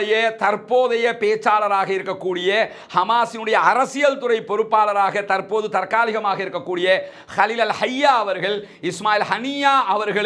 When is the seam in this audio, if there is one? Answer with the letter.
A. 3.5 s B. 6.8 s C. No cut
C